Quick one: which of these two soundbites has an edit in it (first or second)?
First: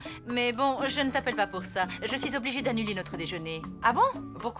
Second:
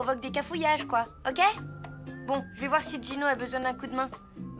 first